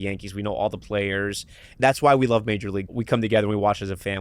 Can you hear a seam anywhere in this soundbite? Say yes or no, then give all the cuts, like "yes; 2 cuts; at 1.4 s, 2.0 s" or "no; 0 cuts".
yes; 2 cuts; at 1.7 s, 2.9 s